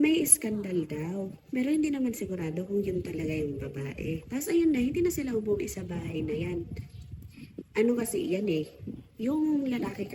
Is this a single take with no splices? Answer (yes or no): yes